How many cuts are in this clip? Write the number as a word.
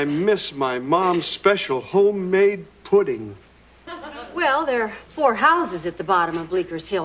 one